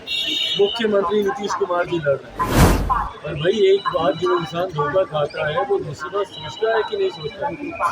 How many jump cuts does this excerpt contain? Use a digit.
1